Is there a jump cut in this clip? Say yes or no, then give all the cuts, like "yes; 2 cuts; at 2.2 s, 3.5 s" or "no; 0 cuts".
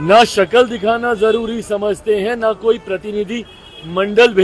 no; 0 cuts